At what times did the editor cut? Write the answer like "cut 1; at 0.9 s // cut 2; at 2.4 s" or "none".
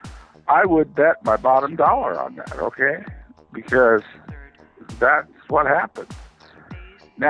none